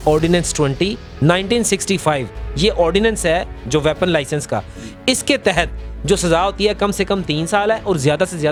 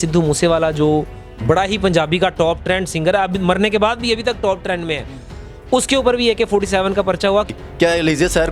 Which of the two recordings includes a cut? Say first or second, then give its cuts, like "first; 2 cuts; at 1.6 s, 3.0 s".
second; 1 cut; at 7.5 s